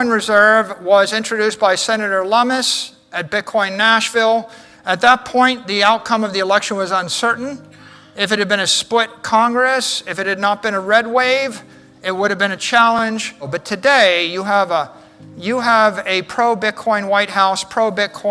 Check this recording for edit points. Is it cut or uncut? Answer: cut